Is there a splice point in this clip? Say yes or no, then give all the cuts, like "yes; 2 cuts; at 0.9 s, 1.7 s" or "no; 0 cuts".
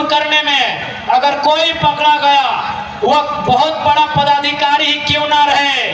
no; 0 cuts